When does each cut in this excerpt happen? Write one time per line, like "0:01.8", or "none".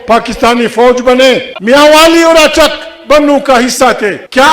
0:01.6